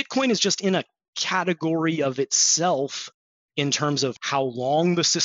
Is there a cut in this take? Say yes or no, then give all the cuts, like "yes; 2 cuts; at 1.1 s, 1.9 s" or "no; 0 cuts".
yes; 2 cuts; at 3.3 s, 4.2 s